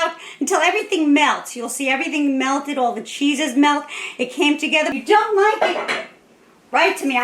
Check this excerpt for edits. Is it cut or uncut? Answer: cut